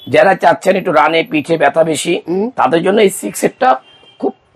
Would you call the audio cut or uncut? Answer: uncut